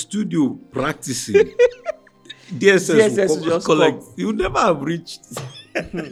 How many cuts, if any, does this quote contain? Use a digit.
0